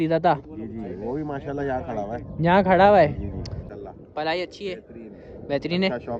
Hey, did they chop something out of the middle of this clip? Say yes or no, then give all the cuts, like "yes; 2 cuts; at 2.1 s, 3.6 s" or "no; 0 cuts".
yes; 1 cut; at 3.6 s